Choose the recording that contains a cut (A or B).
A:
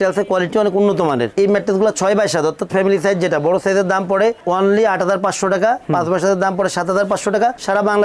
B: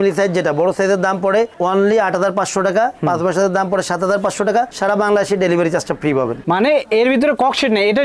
B